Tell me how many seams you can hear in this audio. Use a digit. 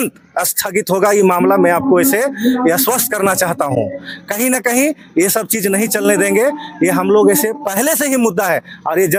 0